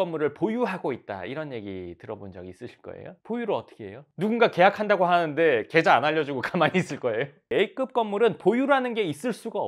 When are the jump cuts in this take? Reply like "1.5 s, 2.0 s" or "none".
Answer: 4.0 s, 7.5 s